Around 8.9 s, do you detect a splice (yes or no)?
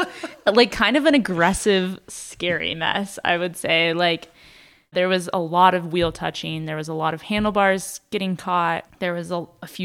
yes